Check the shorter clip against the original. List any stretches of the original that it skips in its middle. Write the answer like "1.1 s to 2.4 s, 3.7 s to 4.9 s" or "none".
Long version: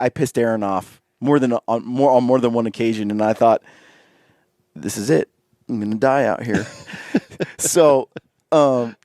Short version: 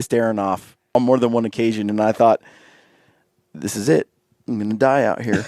1.2 s to 2.2 s